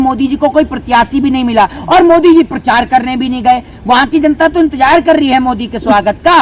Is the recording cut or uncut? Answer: uncut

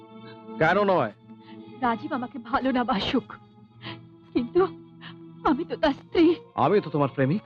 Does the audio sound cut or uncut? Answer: uncut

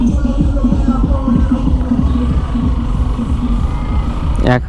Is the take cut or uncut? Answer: uncut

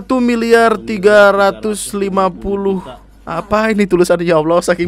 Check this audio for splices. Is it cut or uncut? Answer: uncut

